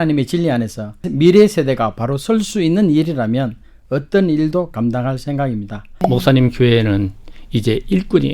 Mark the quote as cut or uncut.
cut